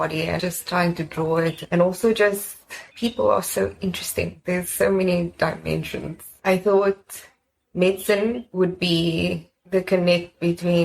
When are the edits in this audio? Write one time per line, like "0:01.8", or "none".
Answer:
0:01.6